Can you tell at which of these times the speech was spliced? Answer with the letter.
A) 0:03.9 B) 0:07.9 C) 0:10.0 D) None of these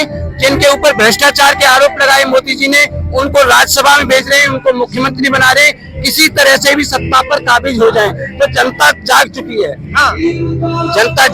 D